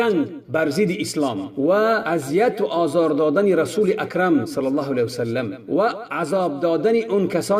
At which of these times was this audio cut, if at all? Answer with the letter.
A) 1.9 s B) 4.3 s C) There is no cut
C